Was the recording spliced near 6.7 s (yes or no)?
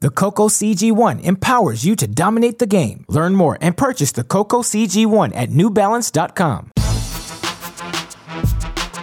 yes